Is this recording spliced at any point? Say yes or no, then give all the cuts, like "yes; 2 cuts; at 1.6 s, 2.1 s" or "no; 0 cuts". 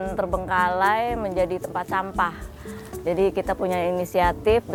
no; 0 cuts